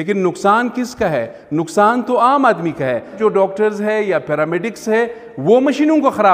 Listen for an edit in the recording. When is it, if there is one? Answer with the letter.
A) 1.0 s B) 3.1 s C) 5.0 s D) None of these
B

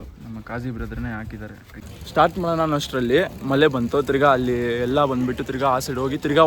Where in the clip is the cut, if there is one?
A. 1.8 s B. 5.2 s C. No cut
A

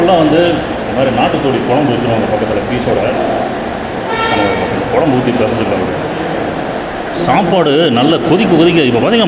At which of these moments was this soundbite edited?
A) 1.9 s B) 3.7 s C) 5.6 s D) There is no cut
D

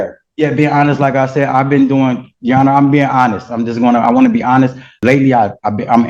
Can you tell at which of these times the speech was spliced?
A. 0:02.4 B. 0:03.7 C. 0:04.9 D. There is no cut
C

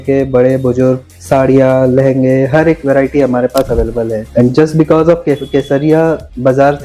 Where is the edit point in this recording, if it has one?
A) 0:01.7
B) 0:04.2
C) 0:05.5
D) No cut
D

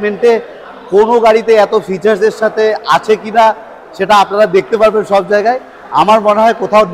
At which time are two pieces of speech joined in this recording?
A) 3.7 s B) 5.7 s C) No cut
C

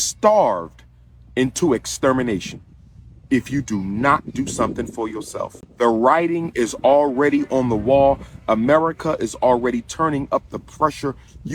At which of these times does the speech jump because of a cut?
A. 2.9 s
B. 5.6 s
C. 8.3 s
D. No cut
B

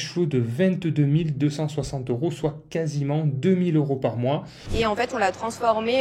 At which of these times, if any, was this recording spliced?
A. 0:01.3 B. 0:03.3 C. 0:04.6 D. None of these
C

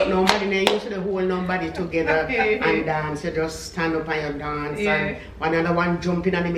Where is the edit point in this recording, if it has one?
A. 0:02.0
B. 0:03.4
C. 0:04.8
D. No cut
D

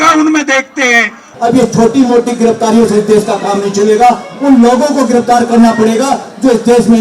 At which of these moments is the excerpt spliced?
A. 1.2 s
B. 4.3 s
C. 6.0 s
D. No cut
A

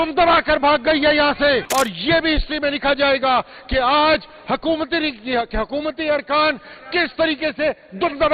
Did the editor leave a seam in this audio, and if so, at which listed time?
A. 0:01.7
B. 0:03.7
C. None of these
A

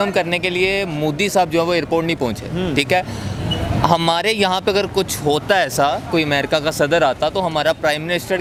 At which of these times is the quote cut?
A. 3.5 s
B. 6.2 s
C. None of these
C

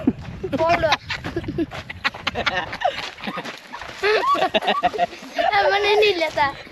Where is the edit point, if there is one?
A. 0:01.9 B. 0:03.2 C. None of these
C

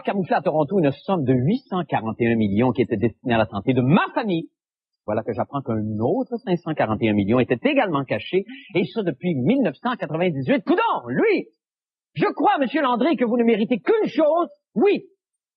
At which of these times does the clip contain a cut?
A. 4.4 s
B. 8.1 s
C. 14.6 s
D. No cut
D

